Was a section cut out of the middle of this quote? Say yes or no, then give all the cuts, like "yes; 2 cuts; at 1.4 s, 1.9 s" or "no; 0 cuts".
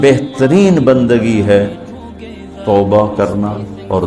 no; 0 cuts